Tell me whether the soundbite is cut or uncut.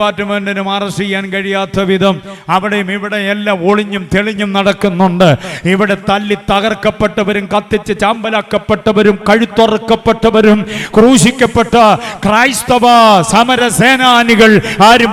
uncut